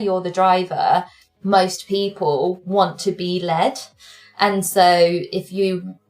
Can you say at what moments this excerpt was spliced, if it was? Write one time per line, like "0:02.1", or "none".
0:01.2